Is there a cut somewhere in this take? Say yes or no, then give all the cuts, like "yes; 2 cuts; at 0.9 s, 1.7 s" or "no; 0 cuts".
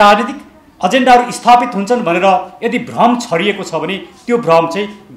no; 0 cuts